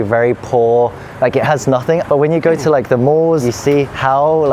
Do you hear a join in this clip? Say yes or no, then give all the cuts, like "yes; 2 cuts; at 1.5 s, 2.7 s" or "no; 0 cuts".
yes; 2 cuts; at 2.0 s, 3.4 s